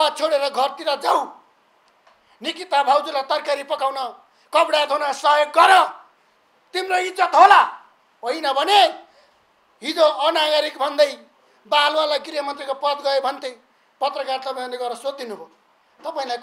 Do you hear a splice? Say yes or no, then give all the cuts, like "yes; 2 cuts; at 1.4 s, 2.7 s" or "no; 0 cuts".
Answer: no; 0 cuts